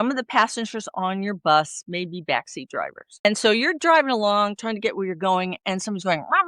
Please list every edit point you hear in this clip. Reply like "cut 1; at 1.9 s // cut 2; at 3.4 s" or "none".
cut 1; at 3.2 s